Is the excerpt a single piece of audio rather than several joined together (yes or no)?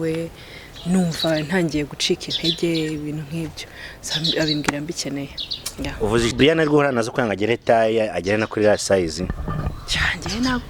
no